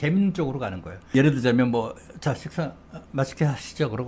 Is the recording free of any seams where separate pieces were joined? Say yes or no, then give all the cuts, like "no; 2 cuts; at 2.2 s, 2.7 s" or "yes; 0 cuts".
no; 1 cut; at 0.9 s